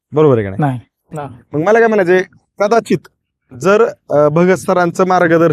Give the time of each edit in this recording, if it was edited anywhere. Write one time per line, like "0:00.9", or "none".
0:01.1